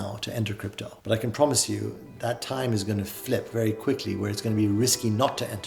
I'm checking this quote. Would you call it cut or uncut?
uncut